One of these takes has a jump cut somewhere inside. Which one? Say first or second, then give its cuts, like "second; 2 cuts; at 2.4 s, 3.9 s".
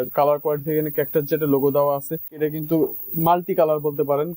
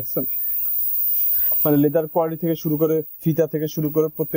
first; 1 cut; at 2.3 s